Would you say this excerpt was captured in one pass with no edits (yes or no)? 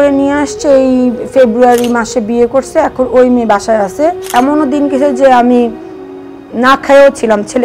no